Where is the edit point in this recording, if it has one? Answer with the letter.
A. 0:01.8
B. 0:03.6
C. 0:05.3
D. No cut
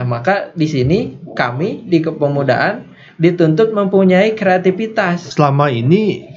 C